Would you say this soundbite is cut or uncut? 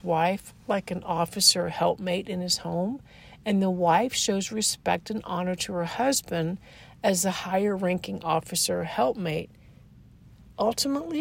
uncut